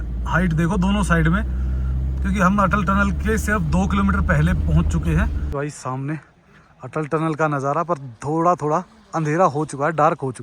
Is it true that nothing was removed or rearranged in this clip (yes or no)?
no